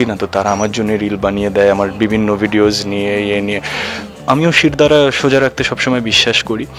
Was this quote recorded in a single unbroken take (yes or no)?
no